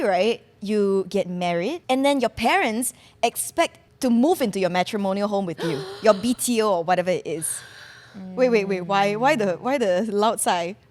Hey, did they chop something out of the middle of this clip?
yes; 2 cuts; at 1.8 s, 3.8 s

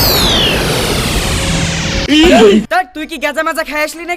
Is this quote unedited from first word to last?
no; 1 cut; at 2.0 s

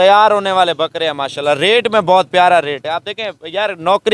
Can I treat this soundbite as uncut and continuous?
yes; 0 cuts

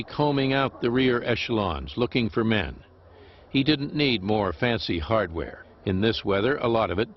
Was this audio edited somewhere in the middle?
no; 0 cuts

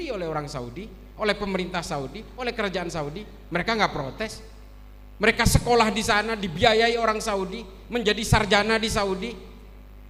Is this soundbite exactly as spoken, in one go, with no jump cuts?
yes; 0 cuts

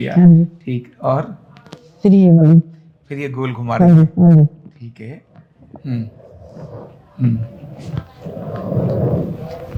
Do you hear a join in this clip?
no; 0 cuts

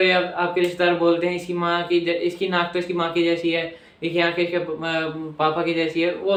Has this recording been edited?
no; 0 cuts

